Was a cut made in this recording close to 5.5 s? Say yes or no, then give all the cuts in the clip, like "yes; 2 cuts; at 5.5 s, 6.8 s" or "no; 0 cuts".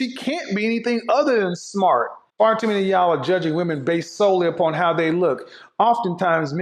no; 1 cut; at 2.2 s